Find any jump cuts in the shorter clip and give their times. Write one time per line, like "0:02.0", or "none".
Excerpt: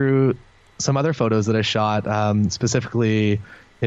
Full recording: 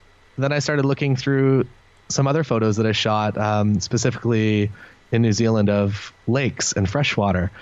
none